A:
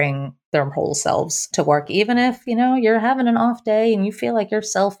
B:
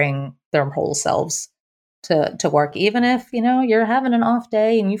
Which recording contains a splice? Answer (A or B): A